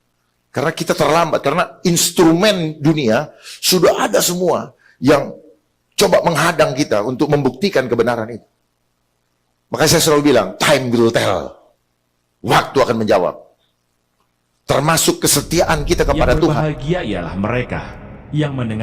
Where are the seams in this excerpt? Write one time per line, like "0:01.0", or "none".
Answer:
0:16.6